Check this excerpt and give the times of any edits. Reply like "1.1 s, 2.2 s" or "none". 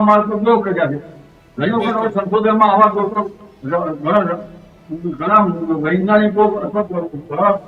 none